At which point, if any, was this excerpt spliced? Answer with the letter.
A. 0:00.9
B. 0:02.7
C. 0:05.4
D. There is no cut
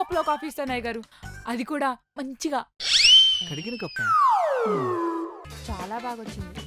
C